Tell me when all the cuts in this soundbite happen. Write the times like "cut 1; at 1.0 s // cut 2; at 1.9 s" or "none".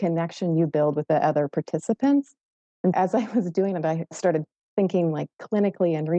cut 1; at 1.0 s // cut 2; at 2.9 s // cut 3; at 4.0 s